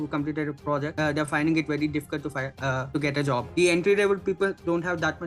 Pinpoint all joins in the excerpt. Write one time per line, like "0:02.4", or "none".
0:00.9
0:03.1